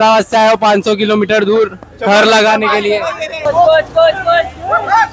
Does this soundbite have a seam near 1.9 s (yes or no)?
no